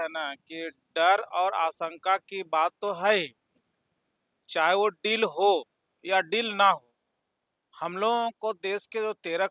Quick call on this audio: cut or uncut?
uncut